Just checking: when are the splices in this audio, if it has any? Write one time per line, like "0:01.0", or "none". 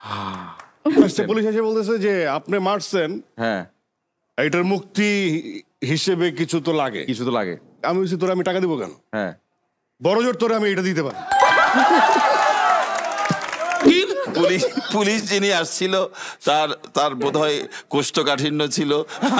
0:01.0
0:13.9

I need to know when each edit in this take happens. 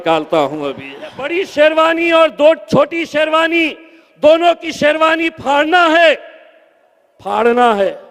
0:01.2

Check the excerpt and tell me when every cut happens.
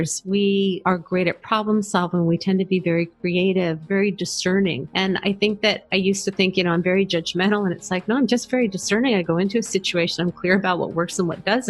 0:03.8

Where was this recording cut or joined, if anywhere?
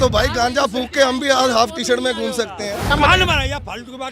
0:02.8

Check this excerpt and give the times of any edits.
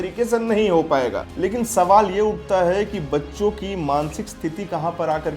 0:01.2

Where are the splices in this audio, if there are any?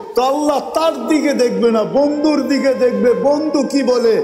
none

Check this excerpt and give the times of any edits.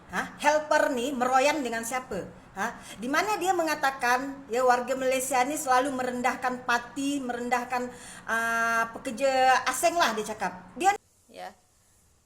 0:11.0

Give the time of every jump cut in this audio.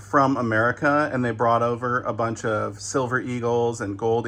none

